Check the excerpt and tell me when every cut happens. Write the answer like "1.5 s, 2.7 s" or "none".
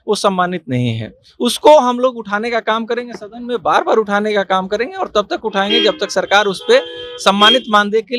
none